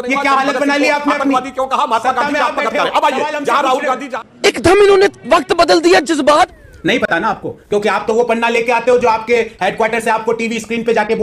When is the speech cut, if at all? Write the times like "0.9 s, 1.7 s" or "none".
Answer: 6.5 s

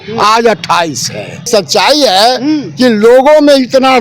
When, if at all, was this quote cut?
1.4 s

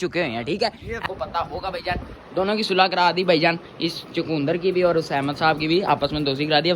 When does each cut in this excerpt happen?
1.0 s, 5.3 s

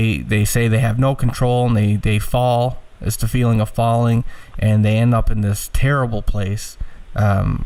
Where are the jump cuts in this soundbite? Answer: none

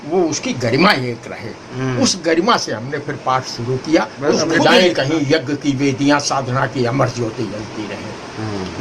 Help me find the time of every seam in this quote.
4.6 s

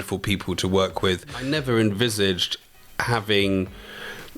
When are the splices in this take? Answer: 1.5 s

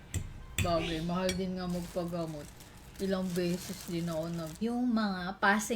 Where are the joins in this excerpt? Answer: 4.5 s

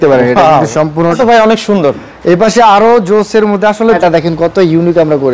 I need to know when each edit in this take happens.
1.2 s, 4.0 s

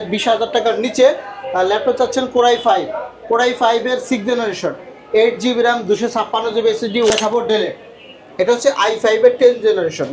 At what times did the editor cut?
7.1 s

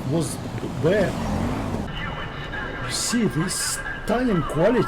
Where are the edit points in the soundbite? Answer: 1.9 s

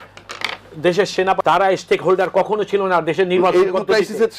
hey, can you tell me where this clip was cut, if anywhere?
1.4 s

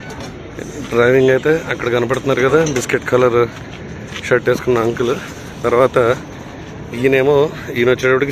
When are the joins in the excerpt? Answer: none

